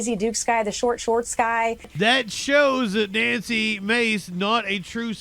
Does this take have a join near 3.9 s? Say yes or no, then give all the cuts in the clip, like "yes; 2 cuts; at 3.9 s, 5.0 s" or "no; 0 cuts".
no; 1 cut; at 1.9 s